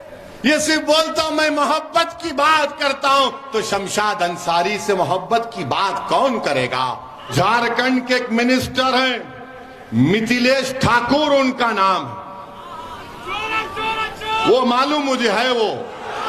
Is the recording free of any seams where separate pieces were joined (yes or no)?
no